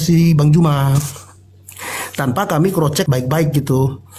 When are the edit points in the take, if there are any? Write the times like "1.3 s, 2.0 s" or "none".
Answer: none